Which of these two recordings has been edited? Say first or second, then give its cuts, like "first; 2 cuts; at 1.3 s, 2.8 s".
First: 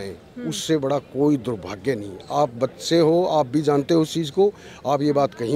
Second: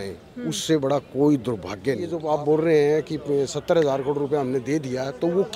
second; 1 cut; at 2.2 s